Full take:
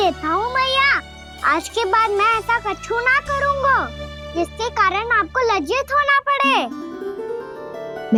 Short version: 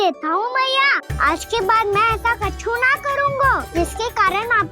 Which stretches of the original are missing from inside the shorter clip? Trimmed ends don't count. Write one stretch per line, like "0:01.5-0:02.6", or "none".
0:01.1-0:01.3
0:03.9-0:04.3